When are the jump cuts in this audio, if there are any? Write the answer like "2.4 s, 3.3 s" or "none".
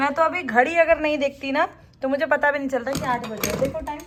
none